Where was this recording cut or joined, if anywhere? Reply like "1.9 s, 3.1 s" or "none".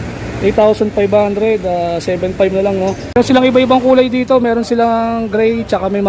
3.0 s